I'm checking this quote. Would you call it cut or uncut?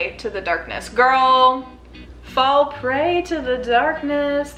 uncut